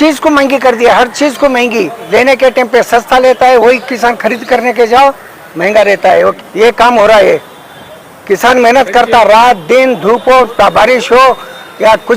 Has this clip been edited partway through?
yes; 2 cuts; at 2.0 s, 6.3 s

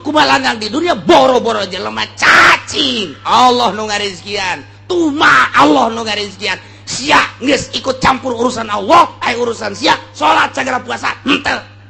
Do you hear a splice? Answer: no; 0 cuts

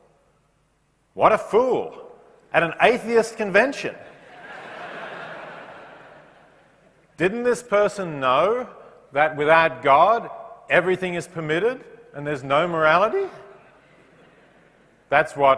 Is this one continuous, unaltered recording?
yes; 0 cuts

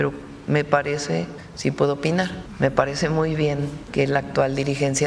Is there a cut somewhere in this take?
yes; 3 cuts; at 1.4 s, 2.4 s, 3.8 s

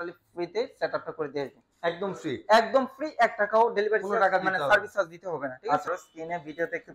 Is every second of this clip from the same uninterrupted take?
no; 1 cut; at 6.0 s

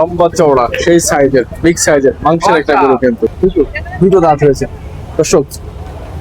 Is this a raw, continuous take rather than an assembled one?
no; 1 cut; at 3.3 s

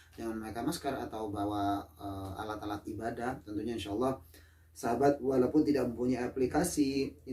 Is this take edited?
no; 0 cuts

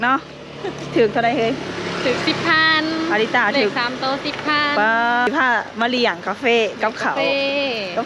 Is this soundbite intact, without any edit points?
no; 1 cut; at 5.3 s

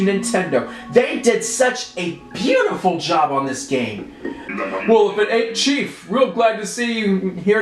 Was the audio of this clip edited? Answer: yes; 1 cut; at 4.4 s

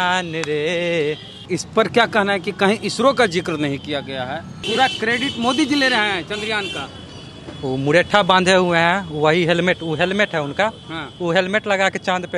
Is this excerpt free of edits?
no; 3 cuts; at 1.4 s, 4.5 s, 6.8 s

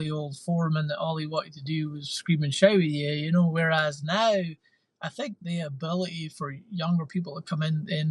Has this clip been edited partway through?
no; 0 cuts

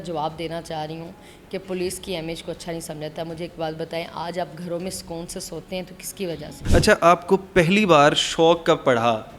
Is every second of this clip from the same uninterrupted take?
no; 1 cut; at 6.5 s

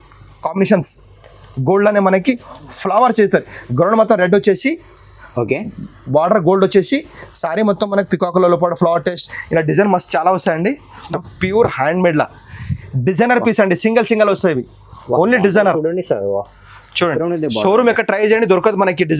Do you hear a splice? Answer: yes; 1 cut; at 11.1 s

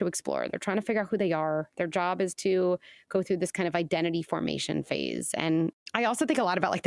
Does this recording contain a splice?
yes; 1 cut; at 5.8 s

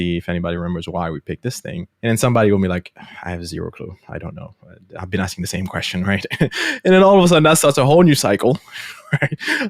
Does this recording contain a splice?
yes; 1 cut; at 1.9 s

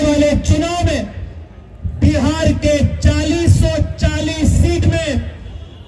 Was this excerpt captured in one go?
yes; 0 cuts

